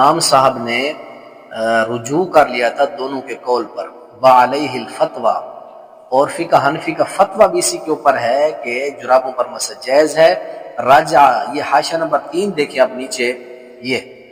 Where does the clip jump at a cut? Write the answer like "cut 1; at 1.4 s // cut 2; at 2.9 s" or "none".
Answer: none

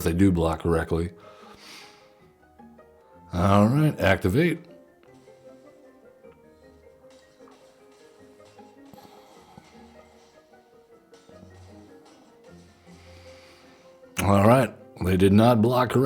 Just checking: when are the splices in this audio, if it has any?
cut 1; at 3.1 s

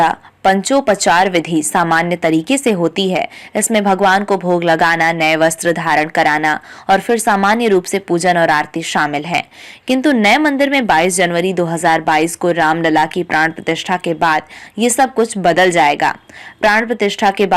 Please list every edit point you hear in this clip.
none

